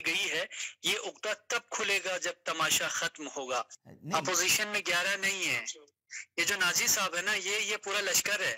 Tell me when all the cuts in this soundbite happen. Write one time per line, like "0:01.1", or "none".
0:03.7